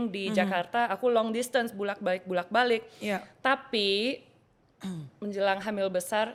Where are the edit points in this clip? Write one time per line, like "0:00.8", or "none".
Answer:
none